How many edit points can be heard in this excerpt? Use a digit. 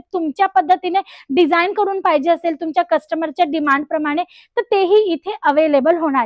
0